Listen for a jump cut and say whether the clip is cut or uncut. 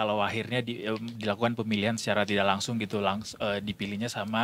uncut